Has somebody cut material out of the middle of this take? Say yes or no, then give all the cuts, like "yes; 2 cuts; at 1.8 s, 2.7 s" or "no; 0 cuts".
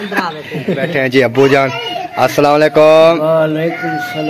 yes; 1 cut; at 0.9 s